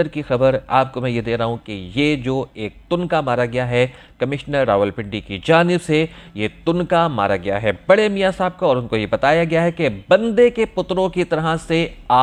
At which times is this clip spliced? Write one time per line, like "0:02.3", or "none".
none